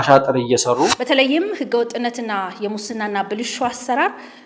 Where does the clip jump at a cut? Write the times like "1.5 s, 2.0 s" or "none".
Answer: 0.9 s